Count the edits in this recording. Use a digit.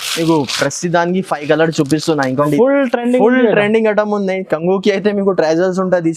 1